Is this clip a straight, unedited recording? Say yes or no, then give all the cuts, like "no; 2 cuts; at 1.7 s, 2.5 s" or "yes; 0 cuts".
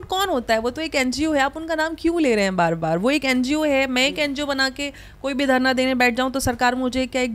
yes; 0 cuts